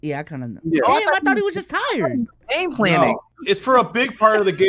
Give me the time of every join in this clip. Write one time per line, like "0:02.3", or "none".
0:03.3